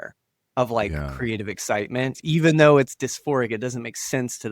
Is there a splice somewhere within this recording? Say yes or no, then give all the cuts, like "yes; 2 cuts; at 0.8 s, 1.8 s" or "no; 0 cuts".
yes; 2 cuts; at 2.2 s, 2.9 s